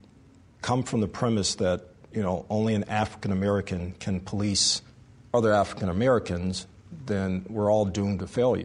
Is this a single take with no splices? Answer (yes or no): yes